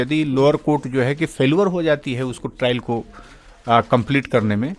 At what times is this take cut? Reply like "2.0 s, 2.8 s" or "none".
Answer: none